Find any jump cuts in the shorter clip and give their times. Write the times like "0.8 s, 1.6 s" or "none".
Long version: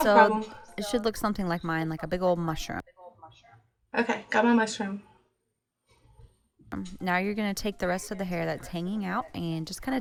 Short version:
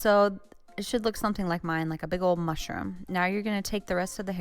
2.8 s